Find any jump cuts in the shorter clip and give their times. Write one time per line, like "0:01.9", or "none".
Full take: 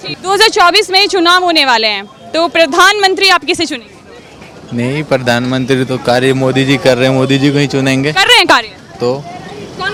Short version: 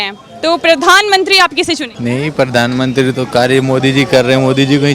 0:01.9

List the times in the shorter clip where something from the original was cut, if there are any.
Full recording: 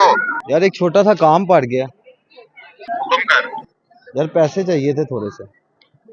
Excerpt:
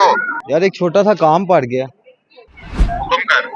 none

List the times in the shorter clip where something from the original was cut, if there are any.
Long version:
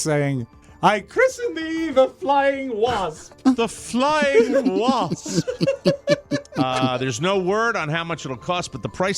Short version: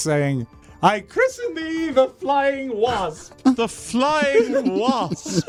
none

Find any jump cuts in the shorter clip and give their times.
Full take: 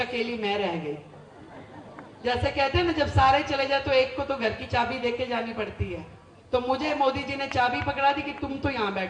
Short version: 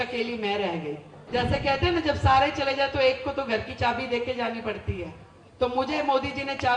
0:01.1

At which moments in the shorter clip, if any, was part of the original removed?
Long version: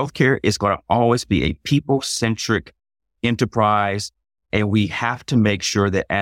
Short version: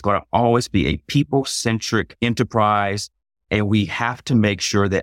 0:02.1

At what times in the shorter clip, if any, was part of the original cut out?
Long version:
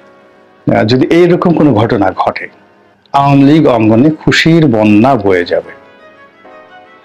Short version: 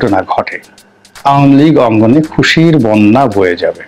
none

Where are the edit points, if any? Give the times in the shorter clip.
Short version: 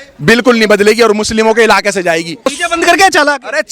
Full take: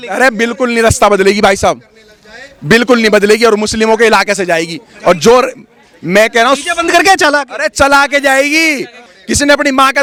0:02.5

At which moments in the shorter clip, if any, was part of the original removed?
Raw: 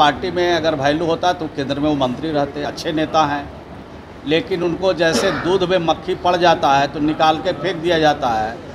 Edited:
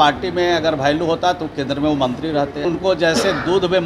0:02.6

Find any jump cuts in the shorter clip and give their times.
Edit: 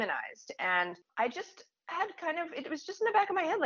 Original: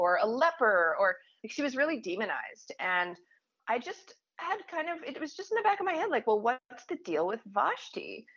0:01.0

